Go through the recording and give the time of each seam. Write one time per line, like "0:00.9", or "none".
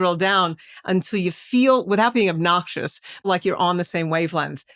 0:03.3